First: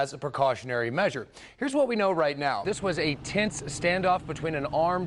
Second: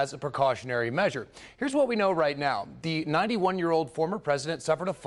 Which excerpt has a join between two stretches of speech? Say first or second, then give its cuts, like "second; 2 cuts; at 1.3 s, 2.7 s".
first; 1 cut; at 2.6 s